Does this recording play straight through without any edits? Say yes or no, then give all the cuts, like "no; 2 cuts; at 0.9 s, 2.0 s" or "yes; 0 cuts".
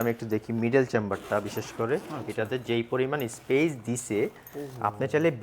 yes; 0 cuts